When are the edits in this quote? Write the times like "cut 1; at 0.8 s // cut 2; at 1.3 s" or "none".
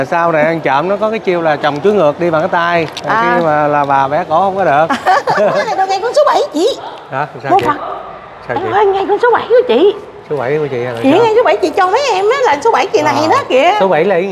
cut 1; at 5.7 s